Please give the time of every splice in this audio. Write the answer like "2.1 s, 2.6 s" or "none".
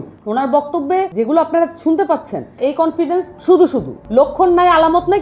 1.1 s, 2.6 s, 4.0 s